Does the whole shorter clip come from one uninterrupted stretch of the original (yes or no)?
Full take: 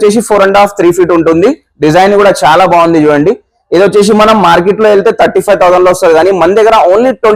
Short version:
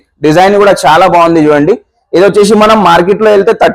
yes